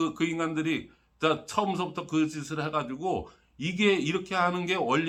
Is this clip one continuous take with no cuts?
yes; 0 cuts

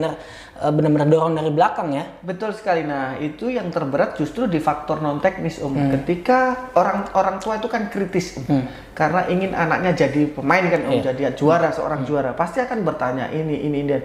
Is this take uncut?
yes; 0 cuts

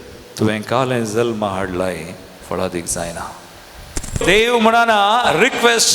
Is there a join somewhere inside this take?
yes; 1 cut; at 4.2 s

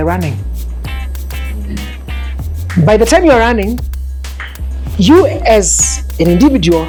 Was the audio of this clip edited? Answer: no; 0 cuts

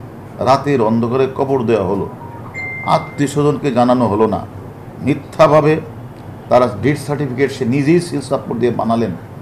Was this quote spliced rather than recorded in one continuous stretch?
no; 0 cuts

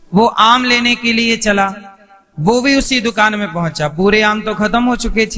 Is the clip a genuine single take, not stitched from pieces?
yes; 0 cuts

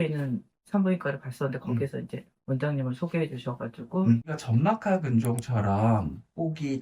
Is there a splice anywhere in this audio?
yes; 1 cut; at 4.2 s

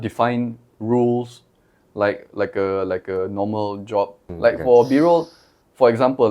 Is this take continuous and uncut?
no; 1 cut; at 4.2 s

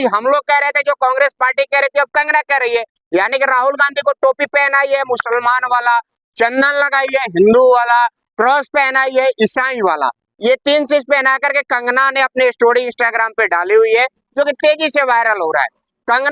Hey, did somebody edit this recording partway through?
no; 0 cuts

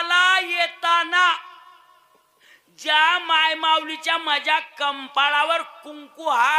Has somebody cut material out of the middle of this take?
no; 0 cuts

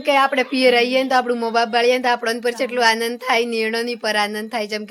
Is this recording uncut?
yes; 0 cuts

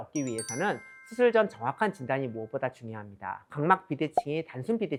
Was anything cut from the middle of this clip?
no; 0 cuts

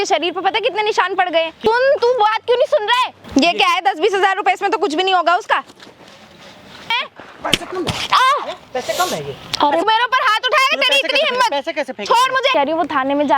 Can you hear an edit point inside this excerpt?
yes; 4 cuts; at 1.6 s, 3.2 s, 6.9 s, 12.5 s

